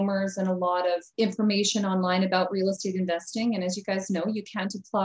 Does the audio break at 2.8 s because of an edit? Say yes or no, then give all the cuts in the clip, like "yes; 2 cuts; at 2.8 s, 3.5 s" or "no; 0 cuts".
no; 1 cut; at 1.1 s